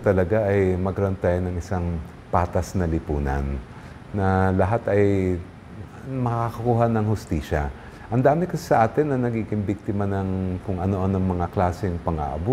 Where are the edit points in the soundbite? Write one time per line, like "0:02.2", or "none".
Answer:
none